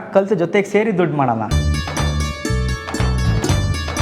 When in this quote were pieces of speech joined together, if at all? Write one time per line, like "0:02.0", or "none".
0:01.5